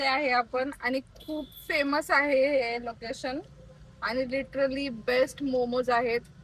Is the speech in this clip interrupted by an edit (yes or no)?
no